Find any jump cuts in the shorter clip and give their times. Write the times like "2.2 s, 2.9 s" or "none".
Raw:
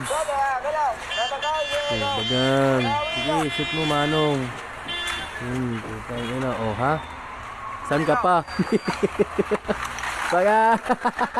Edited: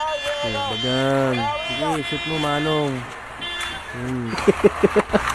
4.3 s